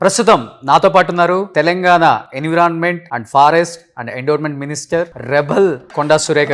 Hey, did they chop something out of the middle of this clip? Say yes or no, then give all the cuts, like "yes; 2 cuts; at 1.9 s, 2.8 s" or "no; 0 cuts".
no; 0 cuts